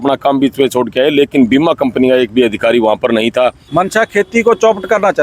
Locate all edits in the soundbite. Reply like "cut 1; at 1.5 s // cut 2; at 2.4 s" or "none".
cut 1; at 3.6 s